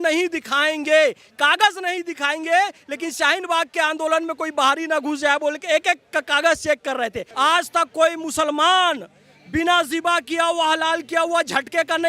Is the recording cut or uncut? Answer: cut